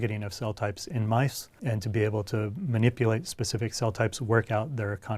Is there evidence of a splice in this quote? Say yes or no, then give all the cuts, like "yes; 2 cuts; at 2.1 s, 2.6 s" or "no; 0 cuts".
yes; 1 cut; at 1.5 s